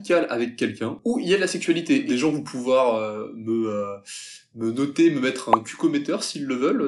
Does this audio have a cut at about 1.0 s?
yes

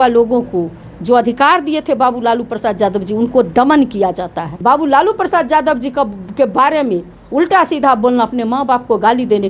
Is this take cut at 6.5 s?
no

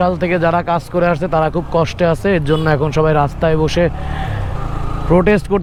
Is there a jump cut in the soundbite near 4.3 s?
no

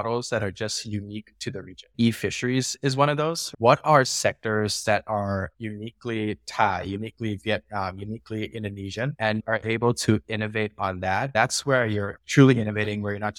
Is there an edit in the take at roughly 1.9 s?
yes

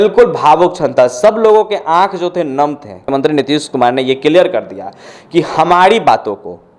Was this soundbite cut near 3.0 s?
yes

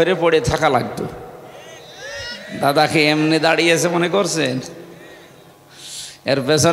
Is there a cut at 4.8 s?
no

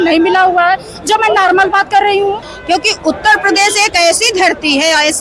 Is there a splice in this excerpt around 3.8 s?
no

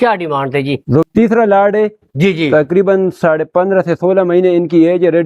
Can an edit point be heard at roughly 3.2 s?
no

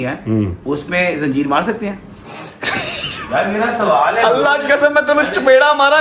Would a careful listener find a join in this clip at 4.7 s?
no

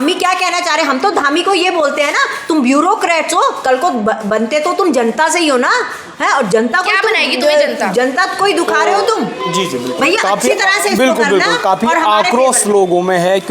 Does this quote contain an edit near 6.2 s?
no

